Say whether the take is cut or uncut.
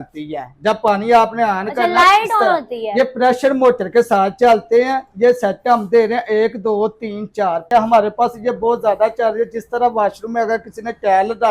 cut